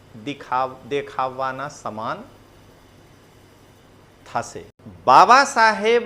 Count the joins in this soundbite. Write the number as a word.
one